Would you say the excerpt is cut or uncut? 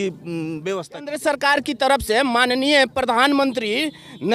cut